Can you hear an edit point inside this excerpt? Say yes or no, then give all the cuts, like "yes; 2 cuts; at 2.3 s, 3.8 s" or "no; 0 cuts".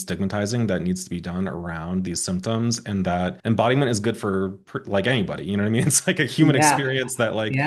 yes; 1 cut; at 3.4 s